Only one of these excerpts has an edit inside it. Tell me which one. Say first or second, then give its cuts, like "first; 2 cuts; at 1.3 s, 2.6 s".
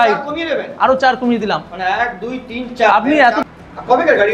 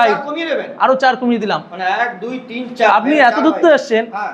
first; 1 cut; at 3.4 s